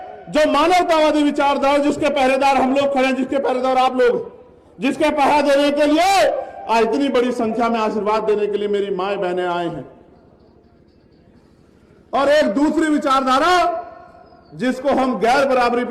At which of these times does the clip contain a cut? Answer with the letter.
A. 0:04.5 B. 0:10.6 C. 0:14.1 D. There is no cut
B